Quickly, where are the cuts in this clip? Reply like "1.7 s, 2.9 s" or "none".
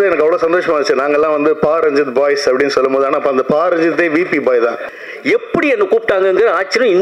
4.8 s